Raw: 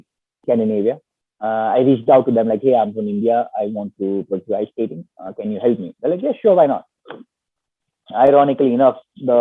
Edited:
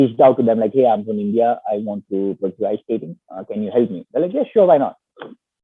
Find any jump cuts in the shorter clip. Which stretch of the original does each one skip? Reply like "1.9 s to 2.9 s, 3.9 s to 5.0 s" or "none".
none